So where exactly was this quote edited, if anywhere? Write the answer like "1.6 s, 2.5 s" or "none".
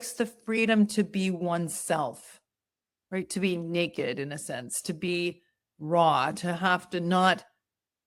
none